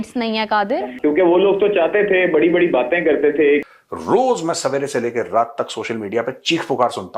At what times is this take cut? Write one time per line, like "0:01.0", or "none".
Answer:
0:00.9
0:03.6